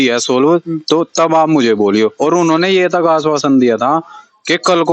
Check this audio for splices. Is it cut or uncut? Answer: uncut